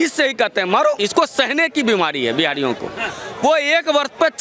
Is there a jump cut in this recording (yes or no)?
yes